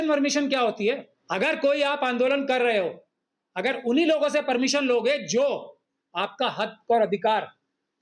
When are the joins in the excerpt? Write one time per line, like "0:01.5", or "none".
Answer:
0:01.1